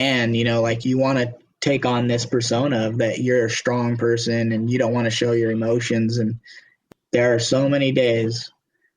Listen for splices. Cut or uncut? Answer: cut